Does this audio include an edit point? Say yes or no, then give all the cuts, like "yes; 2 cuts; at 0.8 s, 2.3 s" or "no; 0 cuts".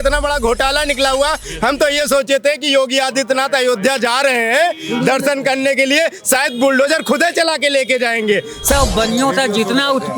yes; 1 cut; at 8.7 s